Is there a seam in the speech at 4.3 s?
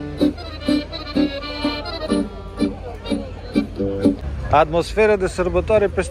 yes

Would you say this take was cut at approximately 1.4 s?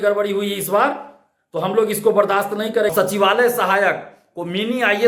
no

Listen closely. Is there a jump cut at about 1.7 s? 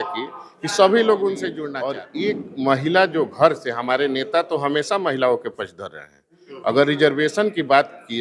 yes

